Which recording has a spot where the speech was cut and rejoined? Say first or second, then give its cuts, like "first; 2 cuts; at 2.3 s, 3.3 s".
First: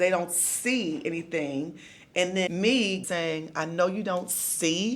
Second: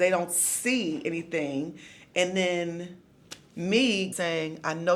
first; 1 cut; at 2.5 s